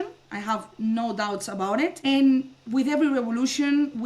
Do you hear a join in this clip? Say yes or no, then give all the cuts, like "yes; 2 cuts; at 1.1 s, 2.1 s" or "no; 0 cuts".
yes; 1 cut; at 2.0 s